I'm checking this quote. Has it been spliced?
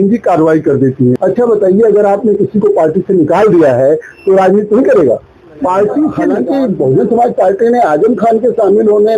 yes; 2 cuts; at 1.2 s, 6.4 s

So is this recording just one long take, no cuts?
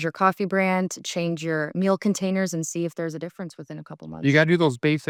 yes; 0 cuts

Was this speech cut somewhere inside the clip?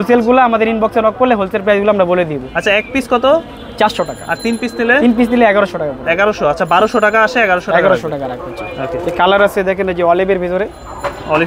no; 0 cuts

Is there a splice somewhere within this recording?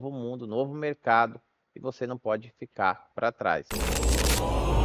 yes; 1 cut; at 3.7 s

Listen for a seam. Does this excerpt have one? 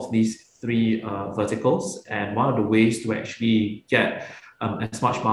no; 0 cuts

